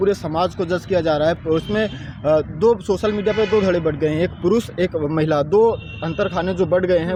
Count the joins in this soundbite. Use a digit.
0